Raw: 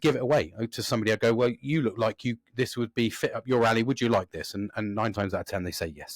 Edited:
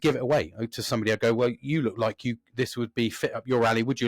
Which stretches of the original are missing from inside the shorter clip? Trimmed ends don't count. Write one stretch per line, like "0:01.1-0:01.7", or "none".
none